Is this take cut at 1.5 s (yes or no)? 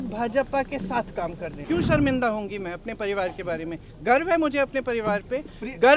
yes